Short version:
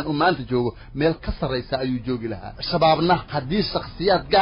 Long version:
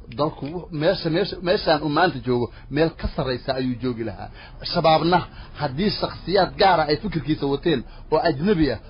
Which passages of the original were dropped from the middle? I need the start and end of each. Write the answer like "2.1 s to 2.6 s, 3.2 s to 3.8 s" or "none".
4.3 s to 4.5 s, 5.4 s to 5.6 s

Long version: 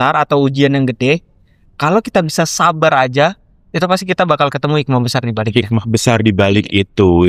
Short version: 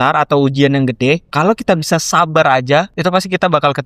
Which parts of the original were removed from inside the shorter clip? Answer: 1.3 s to 1.7 s, 3.4 s to 3.7 s

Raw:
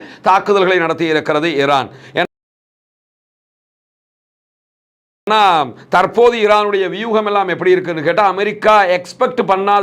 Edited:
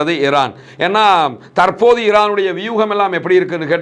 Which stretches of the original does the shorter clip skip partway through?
2.3 s to 5.3 s

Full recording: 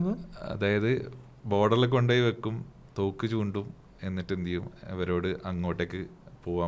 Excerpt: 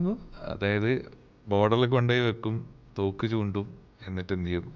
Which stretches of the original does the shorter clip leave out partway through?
none

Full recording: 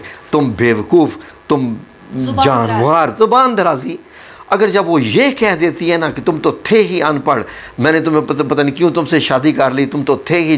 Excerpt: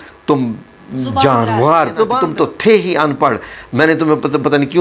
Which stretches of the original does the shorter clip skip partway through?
3.4 s to 6.2 s

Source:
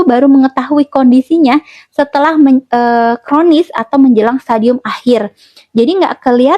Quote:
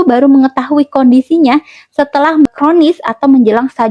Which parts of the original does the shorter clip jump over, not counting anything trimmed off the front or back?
2.5 s to 3.2 s

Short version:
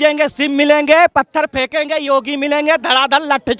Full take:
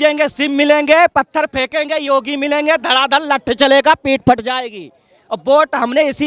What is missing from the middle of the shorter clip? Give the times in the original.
none

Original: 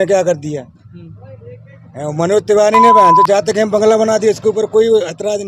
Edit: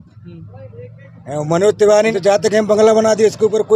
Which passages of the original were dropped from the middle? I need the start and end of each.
2.8 s to 3.2 s

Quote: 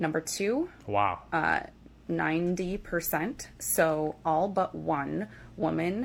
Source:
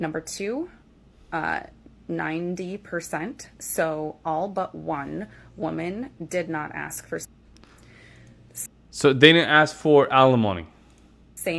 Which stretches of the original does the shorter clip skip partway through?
none

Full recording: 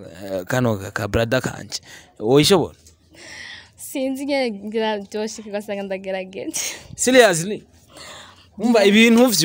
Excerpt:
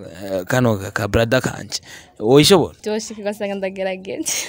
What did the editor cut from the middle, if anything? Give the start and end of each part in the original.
2.8 s to 5.1 s

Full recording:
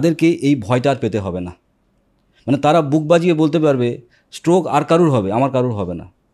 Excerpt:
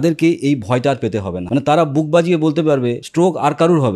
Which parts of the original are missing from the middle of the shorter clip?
1.4 s to 2.3 s, 4.0 s to 4.3 s

